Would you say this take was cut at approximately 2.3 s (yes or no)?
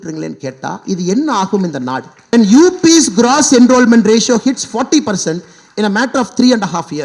yes